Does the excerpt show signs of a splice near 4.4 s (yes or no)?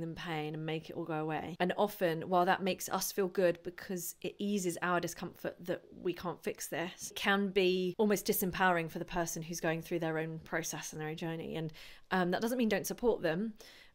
no